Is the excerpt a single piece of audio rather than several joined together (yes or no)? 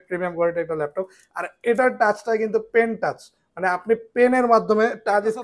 yes